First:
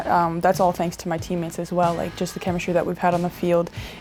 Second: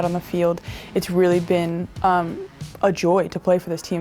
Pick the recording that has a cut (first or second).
second